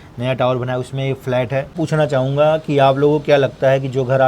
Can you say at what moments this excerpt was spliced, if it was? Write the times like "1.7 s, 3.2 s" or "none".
1.7 s